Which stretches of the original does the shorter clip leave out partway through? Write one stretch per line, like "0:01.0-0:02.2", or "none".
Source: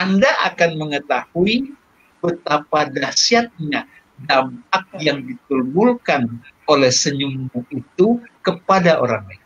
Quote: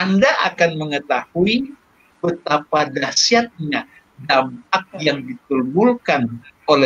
none